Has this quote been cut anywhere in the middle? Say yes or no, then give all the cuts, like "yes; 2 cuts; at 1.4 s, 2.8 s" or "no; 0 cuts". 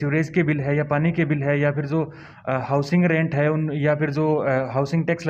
no; 0 cuts